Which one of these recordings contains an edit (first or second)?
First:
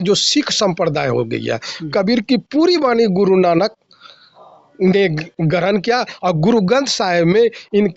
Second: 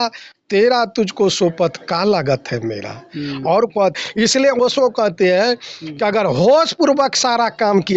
second